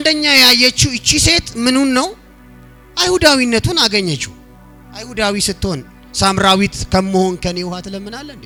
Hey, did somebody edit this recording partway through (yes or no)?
no